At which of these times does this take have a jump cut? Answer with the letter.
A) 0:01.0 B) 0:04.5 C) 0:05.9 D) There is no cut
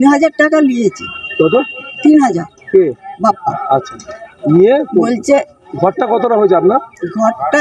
D